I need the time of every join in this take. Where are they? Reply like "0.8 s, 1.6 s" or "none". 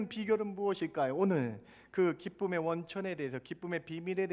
none